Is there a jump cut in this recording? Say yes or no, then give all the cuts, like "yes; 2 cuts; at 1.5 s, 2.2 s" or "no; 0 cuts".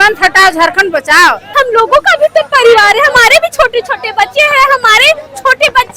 yes; 1 cut; at 1.4 s